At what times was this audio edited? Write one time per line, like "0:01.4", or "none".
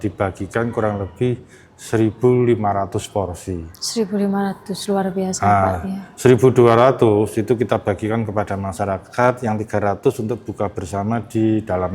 none